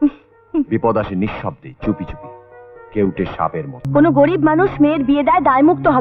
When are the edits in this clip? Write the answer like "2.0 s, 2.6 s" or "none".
3.8 s